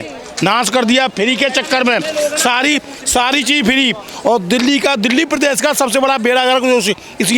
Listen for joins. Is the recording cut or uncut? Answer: uncut